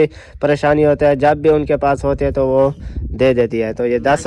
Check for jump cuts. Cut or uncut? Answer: uncut